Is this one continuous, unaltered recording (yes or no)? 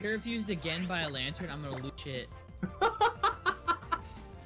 yes